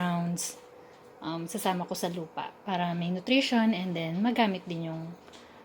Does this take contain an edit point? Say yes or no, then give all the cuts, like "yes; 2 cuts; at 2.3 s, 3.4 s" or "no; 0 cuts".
no; 0 cuts